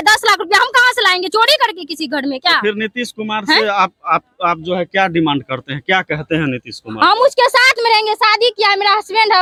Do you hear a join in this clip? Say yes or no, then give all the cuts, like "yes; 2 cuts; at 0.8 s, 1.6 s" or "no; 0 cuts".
no; 0 cuts